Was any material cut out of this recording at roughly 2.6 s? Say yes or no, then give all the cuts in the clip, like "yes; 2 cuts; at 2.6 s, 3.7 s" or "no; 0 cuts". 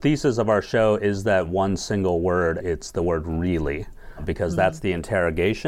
yes; 1 cut; at 2.6 s